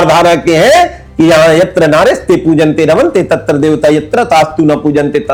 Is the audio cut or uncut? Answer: uncut